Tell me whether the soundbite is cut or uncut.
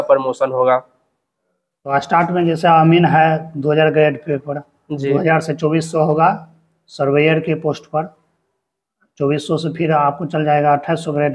uncut